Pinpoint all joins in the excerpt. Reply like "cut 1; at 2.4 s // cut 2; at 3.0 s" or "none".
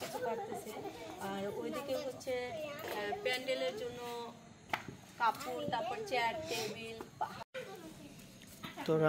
cut 1; at 7.4 s